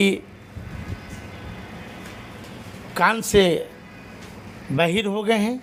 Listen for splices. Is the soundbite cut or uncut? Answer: uncut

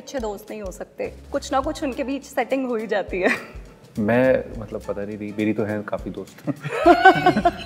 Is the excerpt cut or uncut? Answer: uncut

